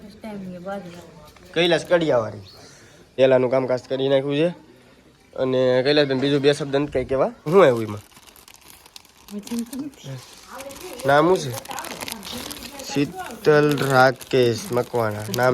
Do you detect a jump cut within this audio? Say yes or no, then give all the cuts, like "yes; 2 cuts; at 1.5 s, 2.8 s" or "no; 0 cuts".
yes; 2 cuts; at 3.1 s, 7.5 s